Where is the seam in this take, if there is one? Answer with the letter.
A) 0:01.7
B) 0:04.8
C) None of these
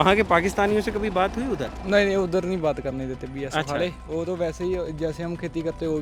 C